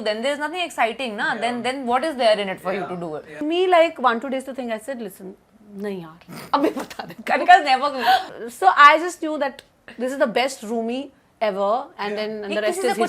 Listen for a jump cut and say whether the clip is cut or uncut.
cut